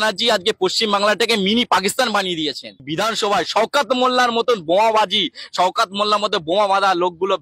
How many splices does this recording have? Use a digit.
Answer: 1